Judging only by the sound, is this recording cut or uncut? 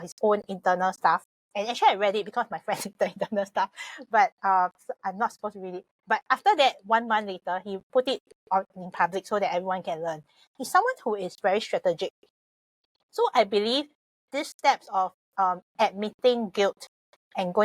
cut